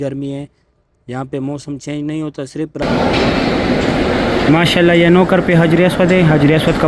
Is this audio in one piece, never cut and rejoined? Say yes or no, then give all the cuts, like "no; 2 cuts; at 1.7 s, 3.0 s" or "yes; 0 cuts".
no; 1 cut; at 2.8 s